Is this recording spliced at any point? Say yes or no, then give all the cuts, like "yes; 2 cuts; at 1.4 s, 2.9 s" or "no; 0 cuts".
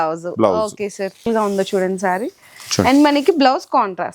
yes; 1 cut; at 1.3 s